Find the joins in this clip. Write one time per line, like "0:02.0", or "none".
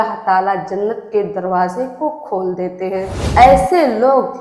0:03.1